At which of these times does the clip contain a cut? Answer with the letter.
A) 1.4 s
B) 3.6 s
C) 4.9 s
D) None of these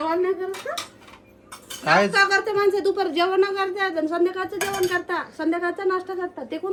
D